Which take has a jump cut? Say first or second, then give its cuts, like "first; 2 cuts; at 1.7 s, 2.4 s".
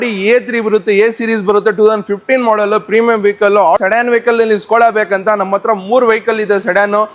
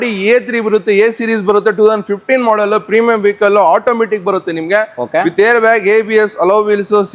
first; 1 cut; at 3.8 s